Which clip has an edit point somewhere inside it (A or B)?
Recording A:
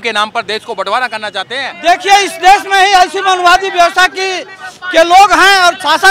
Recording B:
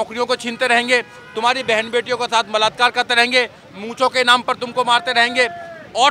A